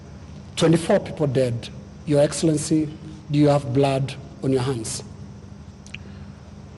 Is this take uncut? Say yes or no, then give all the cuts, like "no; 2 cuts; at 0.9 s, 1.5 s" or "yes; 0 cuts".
yes; 0 cuts